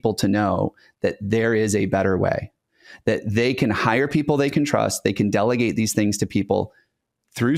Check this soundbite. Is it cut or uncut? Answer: uncut